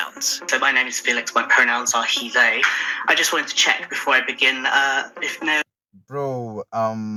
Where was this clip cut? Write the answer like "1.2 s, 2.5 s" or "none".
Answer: none